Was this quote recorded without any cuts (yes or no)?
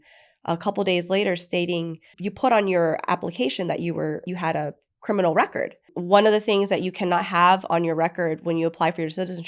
no